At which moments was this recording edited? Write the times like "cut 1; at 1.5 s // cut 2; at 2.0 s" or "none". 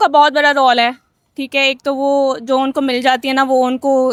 none